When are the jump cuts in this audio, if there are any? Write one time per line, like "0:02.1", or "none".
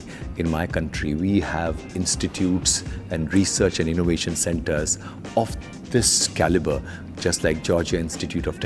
none

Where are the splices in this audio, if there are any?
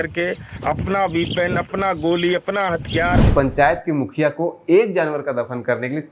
0:03.3

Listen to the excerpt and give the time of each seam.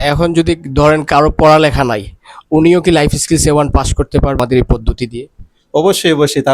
0:04.4

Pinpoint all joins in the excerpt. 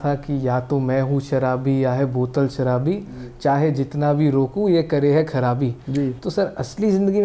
none

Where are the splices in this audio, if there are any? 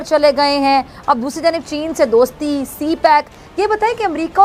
none

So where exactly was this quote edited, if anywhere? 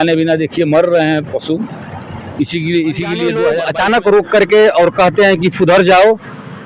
0:03.6

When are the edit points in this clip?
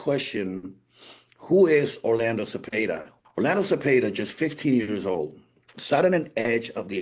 0:03.1

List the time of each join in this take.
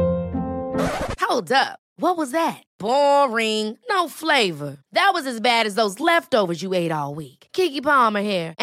none

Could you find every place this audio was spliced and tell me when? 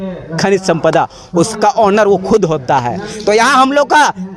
none

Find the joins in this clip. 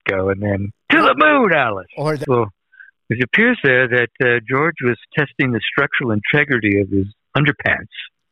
0:02.2

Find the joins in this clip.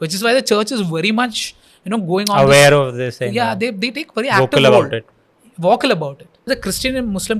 0:06.5

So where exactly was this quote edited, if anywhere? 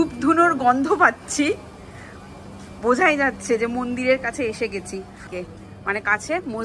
0:05.2

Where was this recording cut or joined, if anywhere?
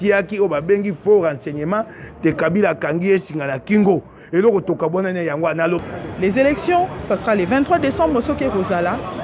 0:05.8

